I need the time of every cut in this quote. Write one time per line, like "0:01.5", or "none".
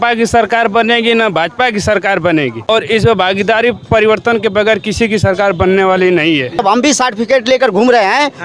0:02.7
0:06.6